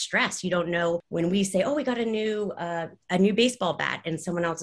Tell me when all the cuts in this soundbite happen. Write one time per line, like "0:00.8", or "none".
0:01.1

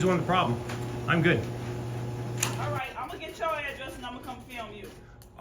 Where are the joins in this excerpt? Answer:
0:02.6

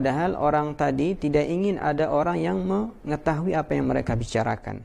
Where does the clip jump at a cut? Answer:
none

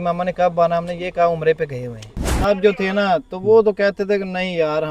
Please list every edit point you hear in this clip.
0:02.4

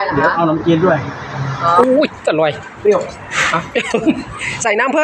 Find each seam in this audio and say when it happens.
0:01.8

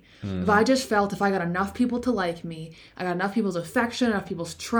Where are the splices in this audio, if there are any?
none

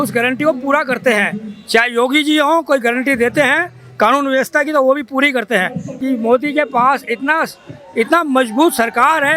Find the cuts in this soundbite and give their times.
0:05.8

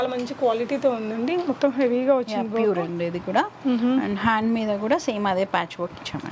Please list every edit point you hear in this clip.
none

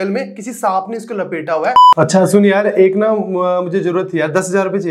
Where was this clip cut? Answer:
0:01.8

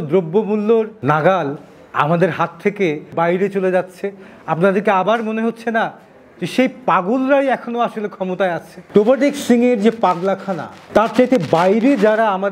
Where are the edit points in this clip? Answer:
0:03.1
0:08.8

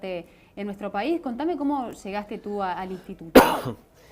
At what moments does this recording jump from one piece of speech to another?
0:02.1

